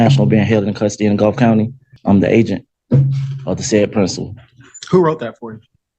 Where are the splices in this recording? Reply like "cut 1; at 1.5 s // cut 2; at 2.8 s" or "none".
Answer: cut 1; at 1.9 s